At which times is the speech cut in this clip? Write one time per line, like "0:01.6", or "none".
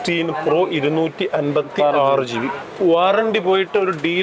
0:02.6